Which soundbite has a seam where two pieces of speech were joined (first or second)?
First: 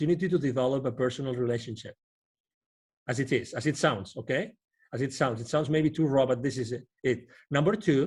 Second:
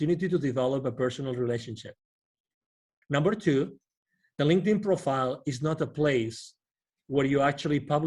second